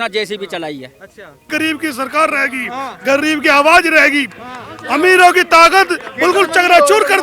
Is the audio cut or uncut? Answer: cut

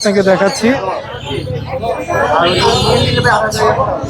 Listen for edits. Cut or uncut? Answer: uncut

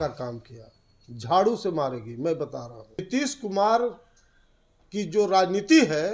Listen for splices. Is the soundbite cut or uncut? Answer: cut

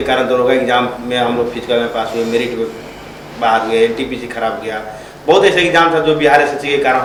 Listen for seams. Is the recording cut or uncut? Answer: uncut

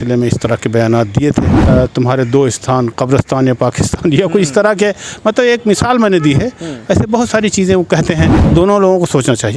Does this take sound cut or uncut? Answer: cut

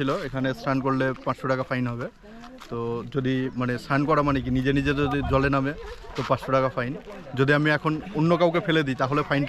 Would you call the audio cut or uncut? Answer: uncut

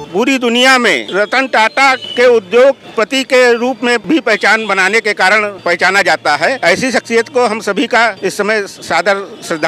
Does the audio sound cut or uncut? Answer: cut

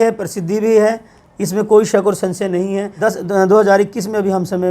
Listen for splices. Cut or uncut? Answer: cut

